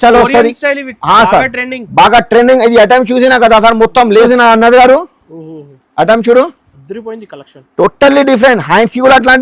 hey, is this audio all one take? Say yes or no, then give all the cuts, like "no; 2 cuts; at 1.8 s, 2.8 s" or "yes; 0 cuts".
no; 1 cut; at 4.3 s